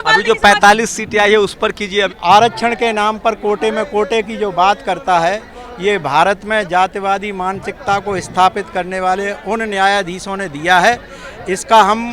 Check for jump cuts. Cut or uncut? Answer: cut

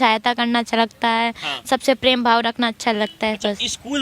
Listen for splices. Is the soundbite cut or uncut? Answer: uncut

